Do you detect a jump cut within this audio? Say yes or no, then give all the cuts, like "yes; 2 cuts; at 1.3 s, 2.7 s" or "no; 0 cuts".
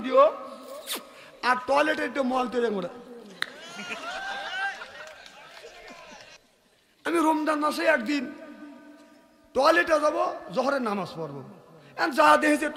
yes; 1 cut; at 6.3 s